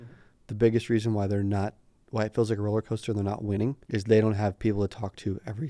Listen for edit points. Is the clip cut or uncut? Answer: cut